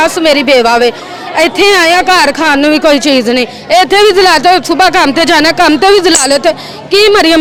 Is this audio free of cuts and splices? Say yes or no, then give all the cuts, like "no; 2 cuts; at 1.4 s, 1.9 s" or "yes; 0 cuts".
yes; 0 cuts